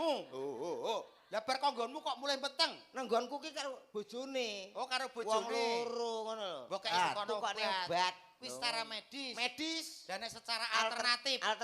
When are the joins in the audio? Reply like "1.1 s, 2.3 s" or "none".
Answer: 6.9 s

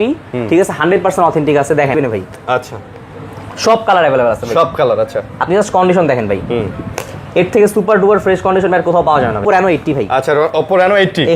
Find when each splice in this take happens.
1.9 s, 9.4 s

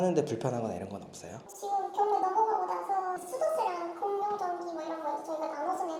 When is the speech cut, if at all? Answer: none

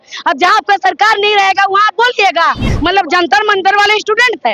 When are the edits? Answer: 2.7 s

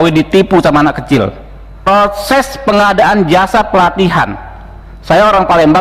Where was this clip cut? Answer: 1.9 s

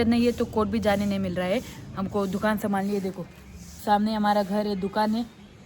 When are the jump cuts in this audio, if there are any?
none

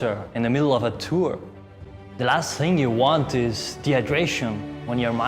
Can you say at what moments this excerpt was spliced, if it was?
1.8 s

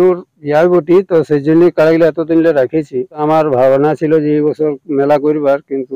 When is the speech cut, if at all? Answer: 3.2 s

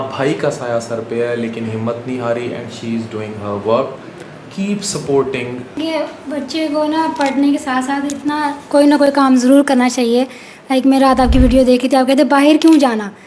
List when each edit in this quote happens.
5.8 s

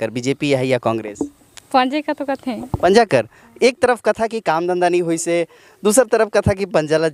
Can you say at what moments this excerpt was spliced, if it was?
none

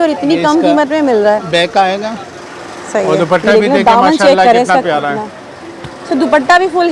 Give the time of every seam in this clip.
none

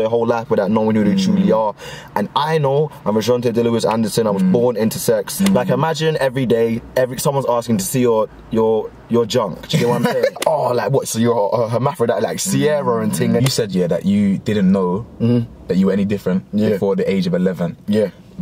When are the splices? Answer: 5.3 s, 10.4 s, 13.4 s

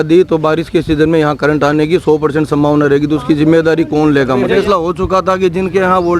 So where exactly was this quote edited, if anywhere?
4.5 s

